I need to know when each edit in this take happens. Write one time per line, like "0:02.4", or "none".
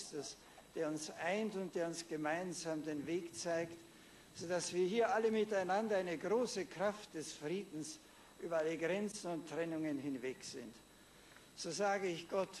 0:11.6